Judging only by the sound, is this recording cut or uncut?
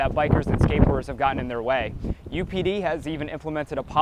uncut